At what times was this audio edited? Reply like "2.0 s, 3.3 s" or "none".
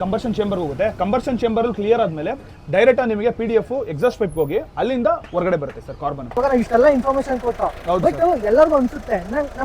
6.3 s